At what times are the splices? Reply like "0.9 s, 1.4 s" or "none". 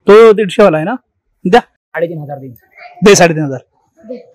1.7 s